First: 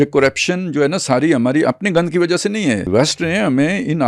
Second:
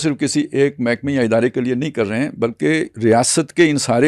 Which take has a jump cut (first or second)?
first